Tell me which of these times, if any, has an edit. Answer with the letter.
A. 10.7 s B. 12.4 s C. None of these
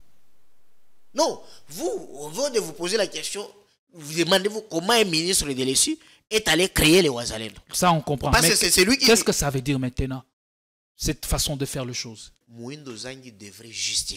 B